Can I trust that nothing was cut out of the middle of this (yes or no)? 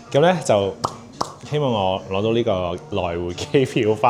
yes